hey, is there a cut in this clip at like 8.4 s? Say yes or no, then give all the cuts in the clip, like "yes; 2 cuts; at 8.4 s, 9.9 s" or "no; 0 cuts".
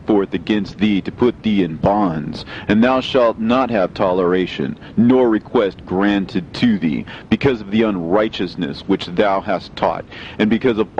yes; 1 cut; at 8.4 s